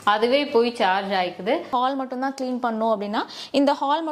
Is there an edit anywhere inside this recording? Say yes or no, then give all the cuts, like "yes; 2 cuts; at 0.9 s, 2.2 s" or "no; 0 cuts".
yes; 1 cut; at 1.7 s